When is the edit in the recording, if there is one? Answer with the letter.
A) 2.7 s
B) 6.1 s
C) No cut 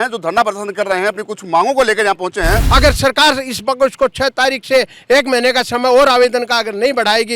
A